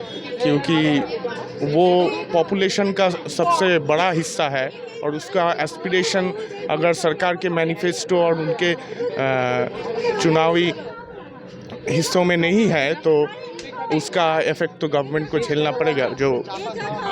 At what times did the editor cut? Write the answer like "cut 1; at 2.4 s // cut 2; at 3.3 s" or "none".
none